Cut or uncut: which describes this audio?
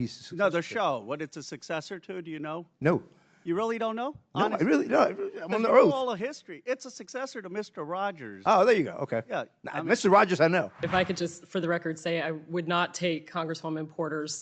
cut